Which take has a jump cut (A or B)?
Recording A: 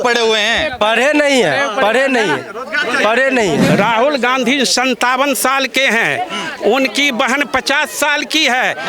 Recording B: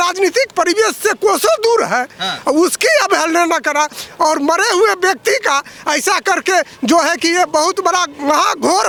A